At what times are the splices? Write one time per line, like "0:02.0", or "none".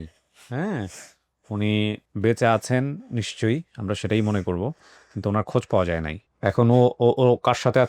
0:02.1
0:06.2